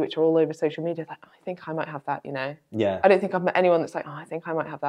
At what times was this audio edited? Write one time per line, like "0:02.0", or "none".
none